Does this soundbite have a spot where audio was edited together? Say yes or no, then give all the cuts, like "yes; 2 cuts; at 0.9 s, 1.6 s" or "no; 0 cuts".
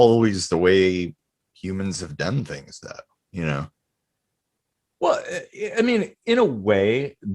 no; 0 cuts